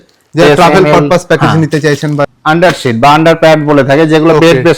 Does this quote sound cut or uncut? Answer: cut